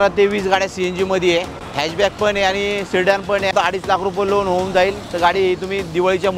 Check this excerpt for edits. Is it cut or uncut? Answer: cut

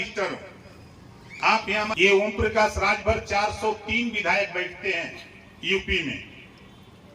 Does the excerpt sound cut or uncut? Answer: cut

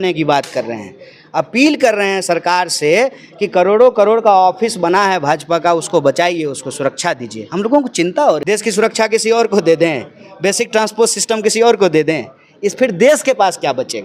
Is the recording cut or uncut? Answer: cut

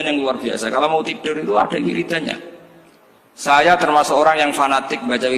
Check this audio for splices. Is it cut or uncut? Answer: cut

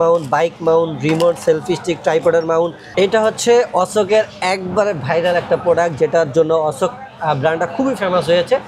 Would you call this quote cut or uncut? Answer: cut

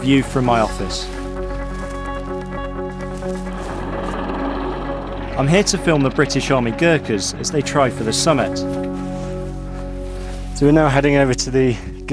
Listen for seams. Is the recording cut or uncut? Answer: cut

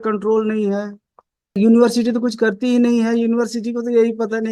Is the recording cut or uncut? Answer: cut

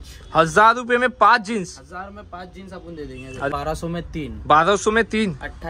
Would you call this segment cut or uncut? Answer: cut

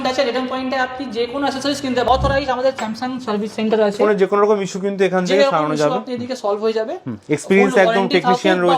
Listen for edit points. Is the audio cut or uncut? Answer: cut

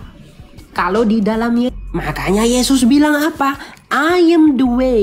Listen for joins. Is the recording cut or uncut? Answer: cut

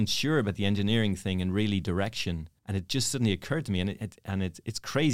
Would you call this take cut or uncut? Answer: cut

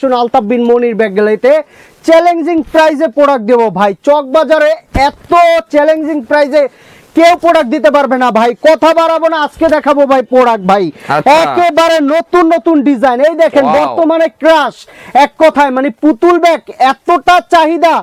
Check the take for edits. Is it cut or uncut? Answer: uncut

